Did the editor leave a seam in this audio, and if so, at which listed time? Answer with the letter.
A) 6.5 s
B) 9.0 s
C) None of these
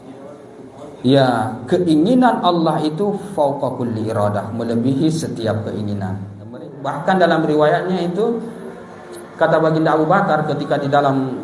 A